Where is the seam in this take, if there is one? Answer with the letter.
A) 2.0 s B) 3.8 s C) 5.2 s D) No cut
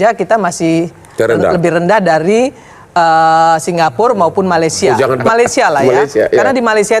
C